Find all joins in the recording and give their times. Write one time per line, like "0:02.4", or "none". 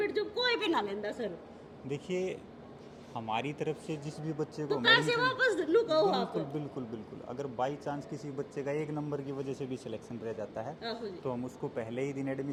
none